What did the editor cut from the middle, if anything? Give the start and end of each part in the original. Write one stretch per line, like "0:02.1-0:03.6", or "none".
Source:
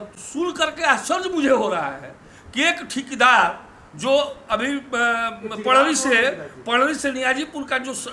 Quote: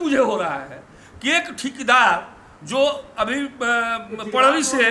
none